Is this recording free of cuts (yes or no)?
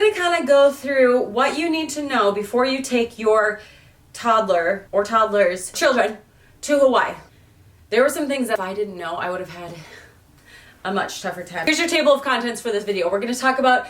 no